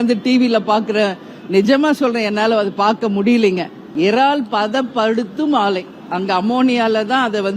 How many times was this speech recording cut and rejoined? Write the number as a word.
one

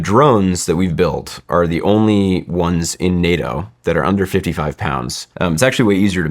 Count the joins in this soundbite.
one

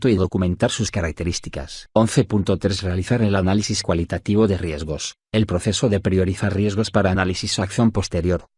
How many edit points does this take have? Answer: two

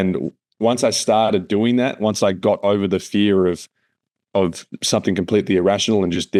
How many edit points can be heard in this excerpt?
zero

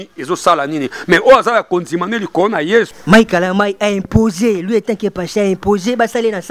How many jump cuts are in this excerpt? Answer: one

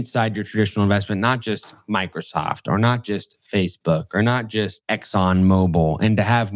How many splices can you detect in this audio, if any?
one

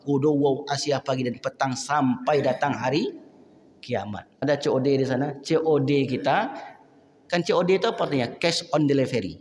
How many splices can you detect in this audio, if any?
one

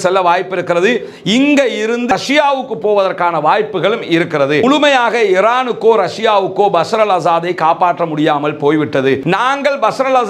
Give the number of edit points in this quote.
three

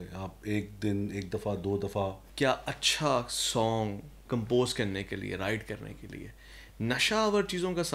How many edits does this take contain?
two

